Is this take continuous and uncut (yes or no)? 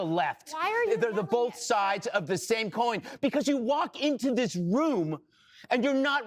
yes